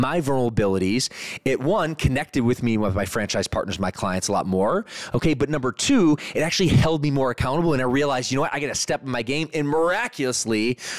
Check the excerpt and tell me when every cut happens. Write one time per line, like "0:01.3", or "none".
none